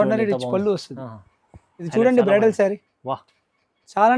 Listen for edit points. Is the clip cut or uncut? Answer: cut